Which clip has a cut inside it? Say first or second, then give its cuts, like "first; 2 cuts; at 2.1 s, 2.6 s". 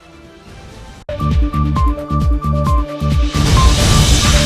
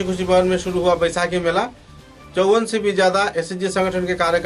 first; 1 cut; at 1.0 s